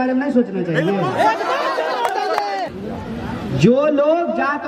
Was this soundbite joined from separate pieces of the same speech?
yes; 1 cut; at 2.7 s

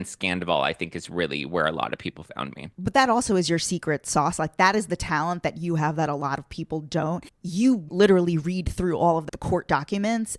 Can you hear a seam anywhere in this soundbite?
yes; 1 cut; at 7.6 s

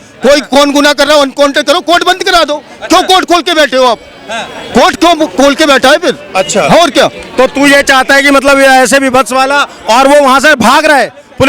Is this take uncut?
yes; 0 cuts

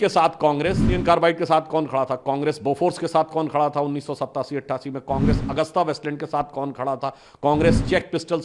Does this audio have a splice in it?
yes; 1 cut; at 1.0 s

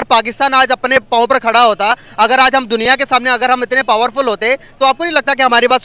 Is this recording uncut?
yes; 0 cuts

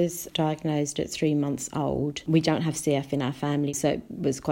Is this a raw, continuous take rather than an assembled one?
no; 2 cuts; at 2.2 s, 3.7 s

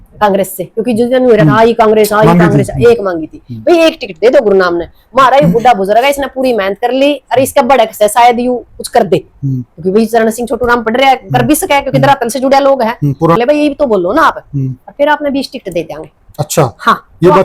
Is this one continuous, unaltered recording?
no; 1 cut; at 13.4 s

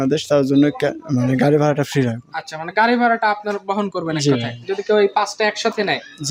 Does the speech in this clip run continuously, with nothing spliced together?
yes; 0 cuts

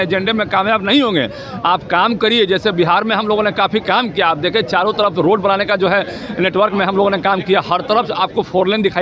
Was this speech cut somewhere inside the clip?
no; 0 cuts

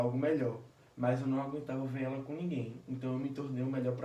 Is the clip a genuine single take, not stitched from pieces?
yes; 0 cuts

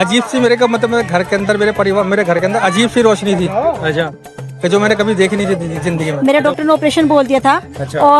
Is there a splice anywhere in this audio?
yes; 1 cut; at 6.1 s

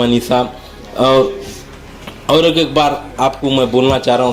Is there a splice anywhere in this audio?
no; 0 cuts

